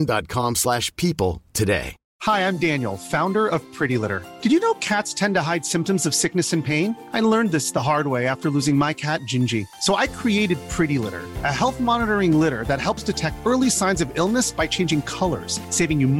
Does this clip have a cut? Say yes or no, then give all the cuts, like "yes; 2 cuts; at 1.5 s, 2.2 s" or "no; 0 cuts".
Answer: yes; 1 cut; at 2.1 s